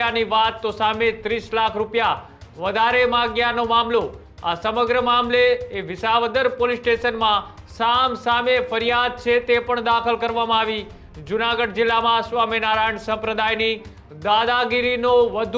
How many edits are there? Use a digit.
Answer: 0